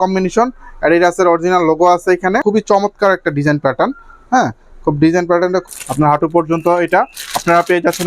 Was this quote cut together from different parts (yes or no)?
yes